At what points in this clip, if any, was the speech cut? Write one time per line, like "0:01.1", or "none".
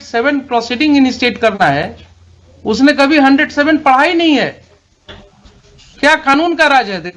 0:05.9